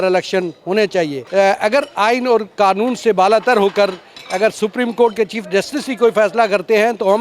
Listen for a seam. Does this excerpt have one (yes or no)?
yes